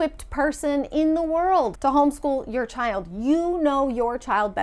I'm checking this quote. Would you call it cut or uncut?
cut